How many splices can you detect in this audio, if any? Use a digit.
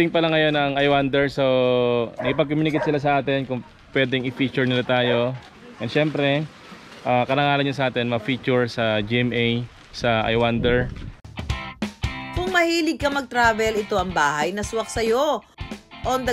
0